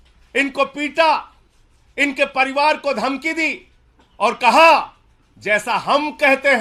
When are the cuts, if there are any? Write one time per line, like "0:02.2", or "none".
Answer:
none

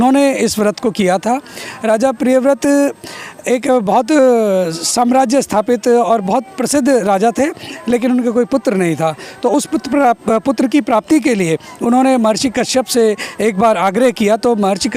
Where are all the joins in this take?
none

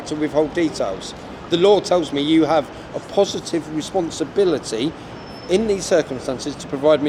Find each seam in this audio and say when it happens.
none

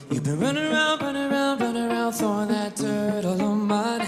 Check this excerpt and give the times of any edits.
none

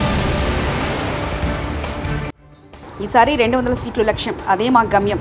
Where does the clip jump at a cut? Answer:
none

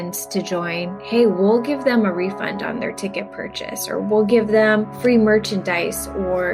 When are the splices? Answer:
0:05.0

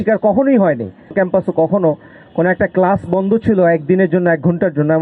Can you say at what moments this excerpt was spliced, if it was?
0:01.1

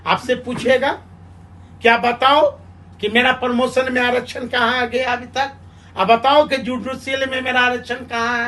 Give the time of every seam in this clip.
none

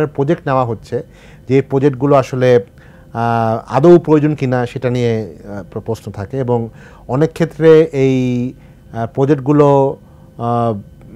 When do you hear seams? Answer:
none

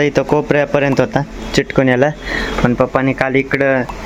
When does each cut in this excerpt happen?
none

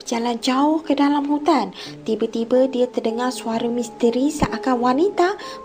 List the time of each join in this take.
none

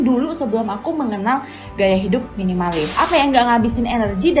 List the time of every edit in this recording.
0:02.9

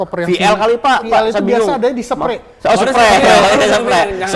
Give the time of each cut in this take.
0:01.0

